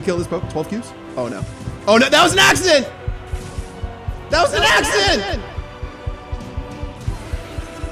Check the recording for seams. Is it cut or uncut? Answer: cut